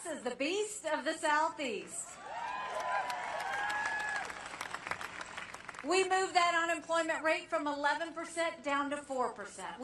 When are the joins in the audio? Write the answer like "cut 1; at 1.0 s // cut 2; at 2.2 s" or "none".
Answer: cut 1; at 3.6 s // cut 2; at 8.6 s